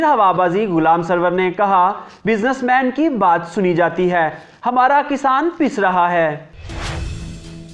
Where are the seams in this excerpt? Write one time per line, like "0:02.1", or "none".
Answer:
0:06.5